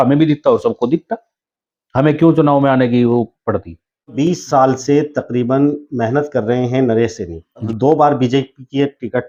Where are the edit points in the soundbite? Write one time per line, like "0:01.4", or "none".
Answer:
none